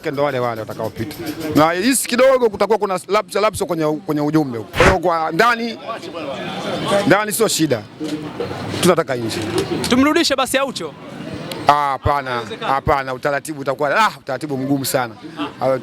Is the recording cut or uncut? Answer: cut